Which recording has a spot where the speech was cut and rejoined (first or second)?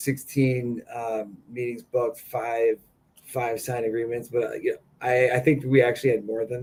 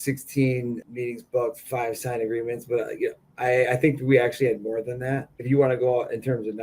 second